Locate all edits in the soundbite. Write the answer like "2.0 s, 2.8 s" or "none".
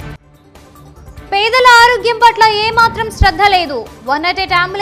1.0 s